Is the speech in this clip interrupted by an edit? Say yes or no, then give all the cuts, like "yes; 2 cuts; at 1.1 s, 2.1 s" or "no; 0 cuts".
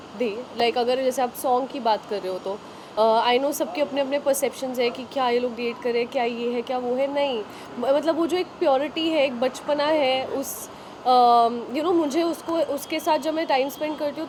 no; 0 cuts